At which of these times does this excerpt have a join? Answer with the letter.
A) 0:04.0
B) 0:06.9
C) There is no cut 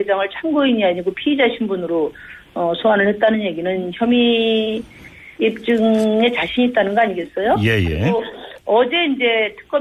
B